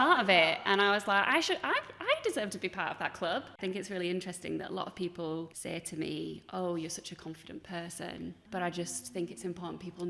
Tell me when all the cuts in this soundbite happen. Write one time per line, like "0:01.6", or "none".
0:03.6
0:05.5
0:08.4